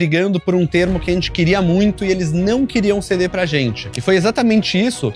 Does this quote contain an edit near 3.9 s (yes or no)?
yes